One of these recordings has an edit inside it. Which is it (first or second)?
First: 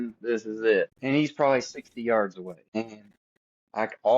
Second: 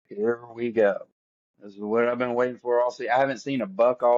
first